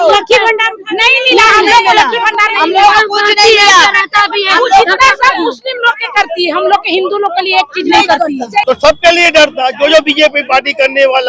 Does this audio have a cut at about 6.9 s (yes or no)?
no